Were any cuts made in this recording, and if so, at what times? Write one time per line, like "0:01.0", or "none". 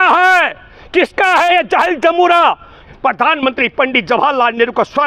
0:02.8

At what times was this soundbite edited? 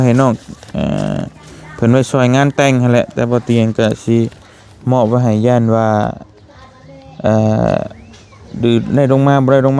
none

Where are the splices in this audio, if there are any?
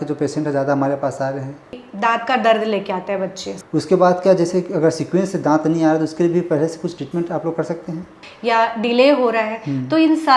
0:01.8
0:03.5
0:08.2

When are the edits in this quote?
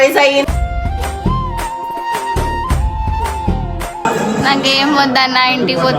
0:04.0

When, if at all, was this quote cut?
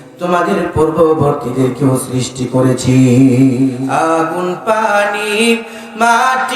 0:03.7

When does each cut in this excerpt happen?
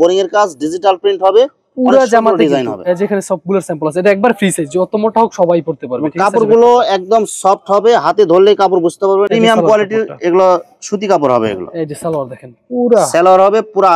none

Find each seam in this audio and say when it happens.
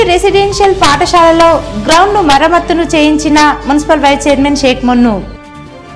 none

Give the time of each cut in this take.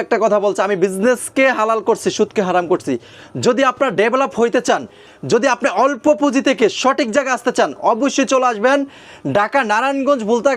none

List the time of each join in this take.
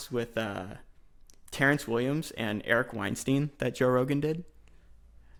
none

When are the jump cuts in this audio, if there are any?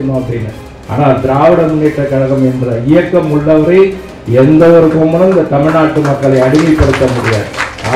none

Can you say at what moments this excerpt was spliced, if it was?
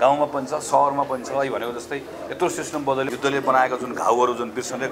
0:03.1

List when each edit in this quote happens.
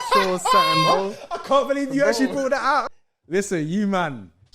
0:02.9

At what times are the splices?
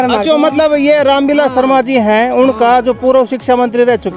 none

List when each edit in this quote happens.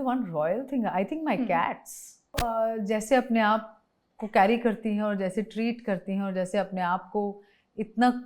0:02.4

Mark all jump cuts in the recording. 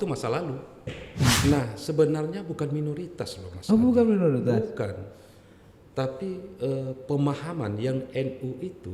0:01.4

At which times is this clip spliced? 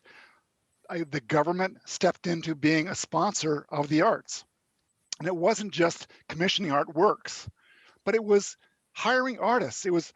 none

